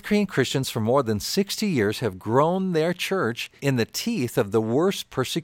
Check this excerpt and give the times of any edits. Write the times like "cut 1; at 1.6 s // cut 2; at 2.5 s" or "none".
cut 1; at 3.6 s